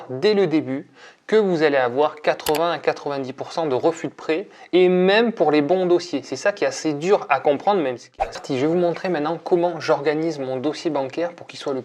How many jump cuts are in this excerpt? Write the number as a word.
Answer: one